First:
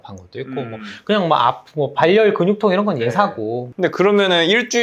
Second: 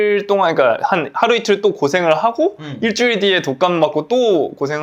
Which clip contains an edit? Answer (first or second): first